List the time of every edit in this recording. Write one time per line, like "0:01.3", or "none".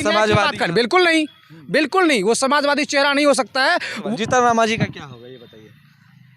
0:04.0